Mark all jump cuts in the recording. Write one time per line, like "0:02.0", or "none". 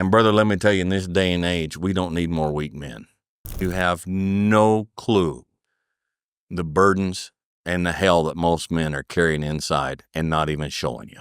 0:03.6